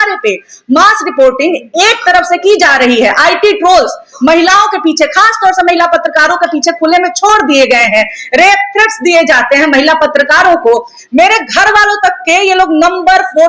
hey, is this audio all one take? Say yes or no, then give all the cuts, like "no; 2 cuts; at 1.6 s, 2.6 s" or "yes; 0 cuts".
yes; 0 cuts